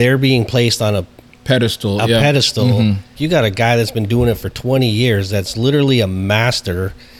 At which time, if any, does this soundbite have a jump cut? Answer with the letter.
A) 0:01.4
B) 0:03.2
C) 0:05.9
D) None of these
B